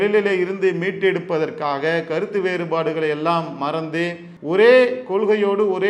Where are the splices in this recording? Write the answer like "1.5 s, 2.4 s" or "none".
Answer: 4.3 s